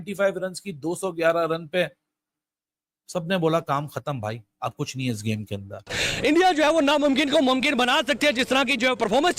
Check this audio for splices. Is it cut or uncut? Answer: cut